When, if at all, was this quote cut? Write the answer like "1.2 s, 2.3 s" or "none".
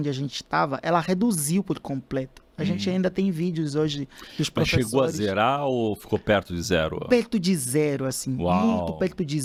none